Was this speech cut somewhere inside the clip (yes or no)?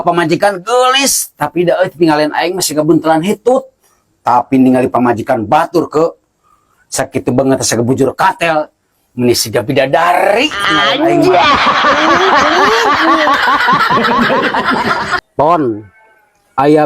yes